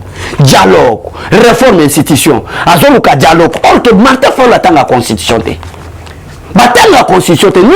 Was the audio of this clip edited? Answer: no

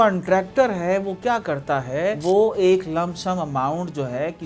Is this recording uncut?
yes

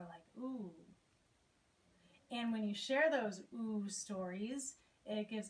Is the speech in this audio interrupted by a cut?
no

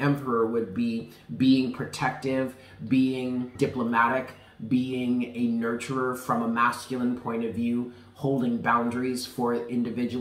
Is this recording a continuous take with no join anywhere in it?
no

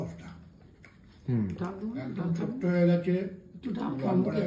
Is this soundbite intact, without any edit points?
yes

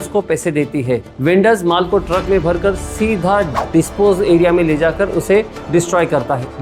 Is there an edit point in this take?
yes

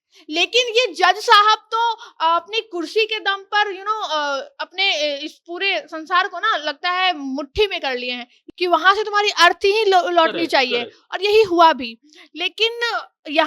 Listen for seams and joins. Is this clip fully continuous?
no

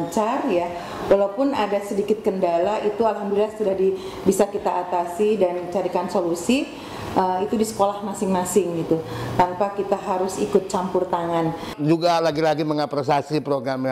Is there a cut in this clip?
yes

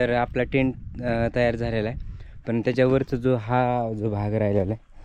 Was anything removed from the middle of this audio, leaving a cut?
no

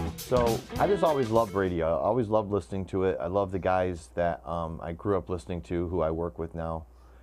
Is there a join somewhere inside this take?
yes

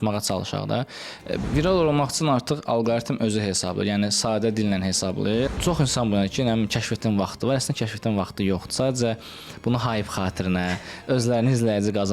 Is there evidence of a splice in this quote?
yes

